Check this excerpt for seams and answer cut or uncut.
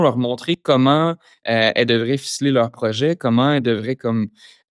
uncut